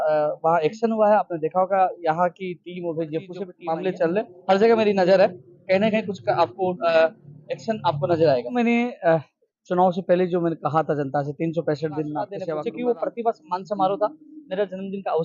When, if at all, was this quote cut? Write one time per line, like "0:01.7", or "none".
0:03.5
0:08.5
0:12.4